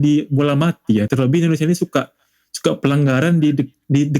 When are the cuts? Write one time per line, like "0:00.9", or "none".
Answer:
0:01.1